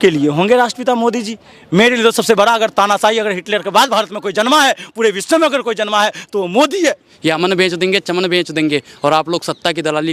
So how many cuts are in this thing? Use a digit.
1